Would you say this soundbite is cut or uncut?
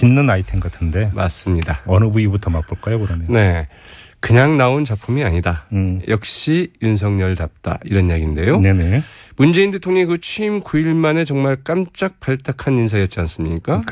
cut